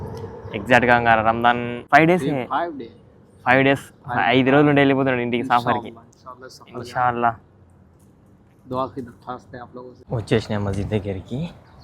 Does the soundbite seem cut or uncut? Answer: cut